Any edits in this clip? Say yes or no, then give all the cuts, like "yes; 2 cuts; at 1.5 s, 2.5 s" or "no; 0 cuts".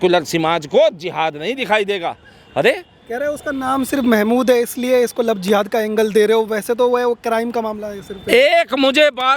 no; 0 cuts